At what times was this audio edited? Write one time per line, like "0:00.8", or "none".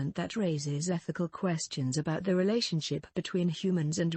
0:01.0